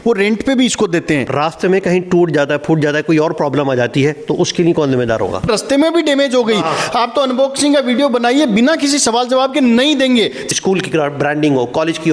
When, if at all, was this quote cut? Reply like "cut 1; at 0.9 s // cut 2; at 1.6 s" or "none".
cut 1; at 1.3 s // cut 2; at 5.5 s // cut 3; at 10.4 s